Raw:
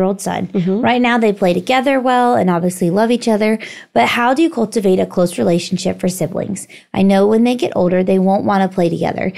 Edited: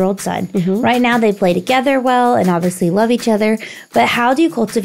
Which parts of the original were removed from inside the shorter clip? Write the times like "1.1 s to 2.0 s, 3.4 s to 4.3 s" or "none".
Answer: none